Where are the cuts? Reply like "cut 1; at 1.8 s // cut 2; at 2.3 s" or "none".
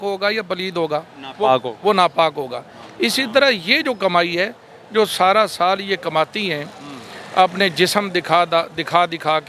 none